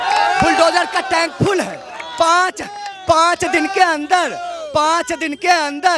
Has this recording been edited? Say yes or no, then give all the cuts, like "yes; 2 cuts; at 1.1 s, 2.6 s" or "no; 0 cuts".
no; 0 cuts